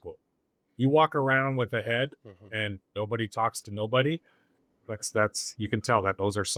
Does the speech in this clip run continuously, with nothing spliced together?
yes; 0 cuts

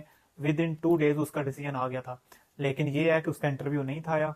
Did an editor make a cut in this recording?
no; 0 cuts

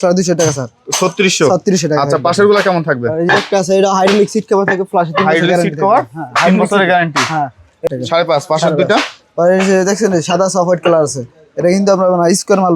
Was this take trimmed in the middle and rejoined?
yes; 1 cut; at 7.8 s

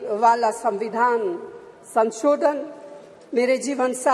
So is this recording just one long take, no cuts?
yes; 0 cuts

